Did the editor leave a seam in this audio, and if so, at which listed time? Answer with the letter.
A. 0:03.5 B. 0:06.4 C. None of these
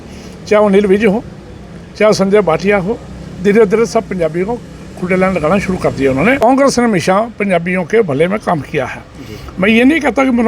B